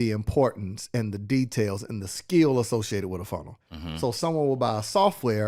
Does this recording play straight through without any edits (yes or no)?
yes